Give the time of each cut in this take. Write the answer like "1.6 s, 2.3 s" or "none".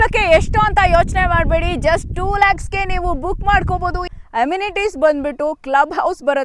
4.1 s